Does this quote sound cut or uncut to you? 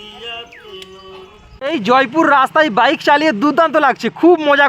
cut